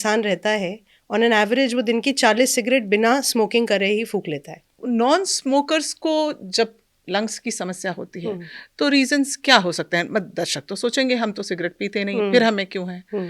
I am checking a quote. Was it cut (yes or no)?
yes